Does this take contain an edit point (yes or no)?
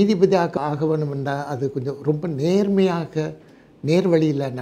no